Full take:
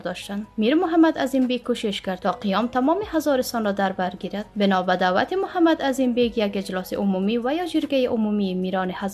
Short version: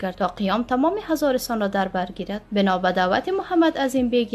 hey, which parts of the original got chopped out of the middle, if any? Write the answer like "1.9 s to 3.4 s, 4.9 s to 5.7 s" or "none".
none